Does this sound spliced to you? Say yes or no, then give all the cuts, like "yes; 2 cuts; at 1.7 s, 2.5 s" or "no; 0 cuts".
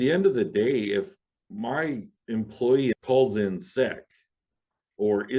yes; 1 cut; at 2.9 s